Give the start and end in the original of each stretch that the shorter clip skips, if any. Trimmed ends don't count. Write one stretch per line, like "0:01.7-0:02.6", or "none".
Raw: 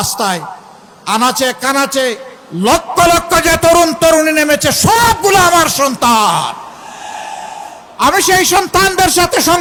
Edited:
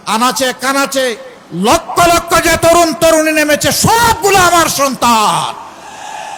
none